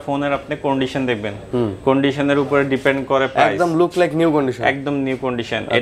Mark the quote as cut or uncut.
uncut